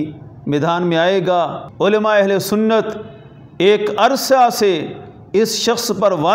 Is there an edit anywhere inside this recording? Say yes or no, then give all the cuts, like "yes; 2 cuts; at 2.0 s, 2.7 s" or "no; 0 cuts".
yes; 1 cut; at 1.6 s